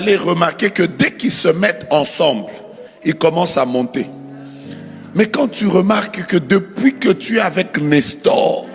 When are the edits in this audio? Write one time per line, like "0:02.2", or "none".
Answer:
none